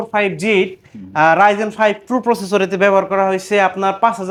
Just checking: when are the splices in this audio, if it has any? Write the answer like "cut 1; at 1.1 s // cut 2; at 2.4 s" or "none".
none